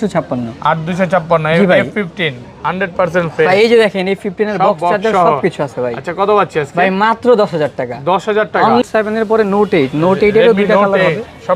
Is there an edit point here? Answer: yes; 1 cut; at 8.8 s

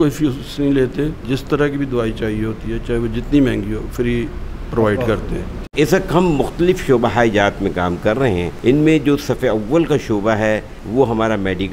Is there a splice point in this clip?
yes; 4 cuts; at 1.3 s, 5.6 s, 8.5 s, 10.8 s

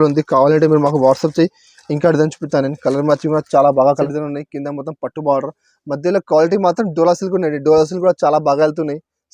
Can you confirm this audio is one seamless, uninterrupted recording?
no; 1 cut; at 4.1 s

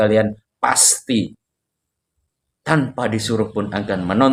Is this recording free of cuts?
yes; 0 cuts

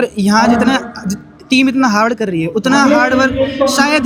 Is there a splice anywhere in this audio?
no; 0 cuts

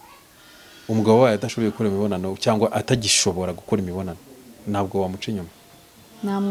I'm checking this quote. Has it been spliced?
no; 0 cuts

